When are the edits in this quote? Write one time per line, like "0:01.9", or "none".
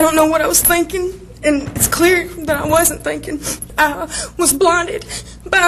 0:03.6